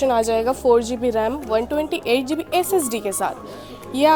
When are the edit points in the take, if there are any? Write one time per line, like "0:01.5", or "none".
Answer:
none

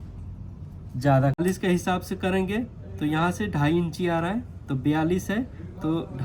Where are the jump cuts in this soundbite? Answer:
0:01.4

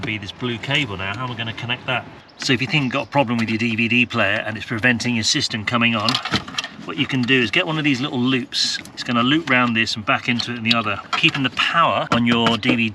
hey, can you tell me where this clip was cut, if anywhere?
0:02.3
0:08.9
0:11.1
0:12.1

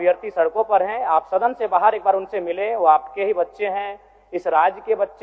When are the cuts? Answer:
none

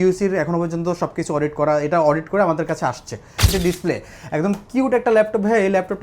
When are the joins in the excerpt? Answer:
0:03.5

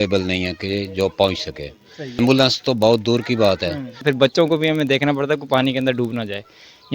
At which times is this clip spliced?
0:02.2
0:04.0

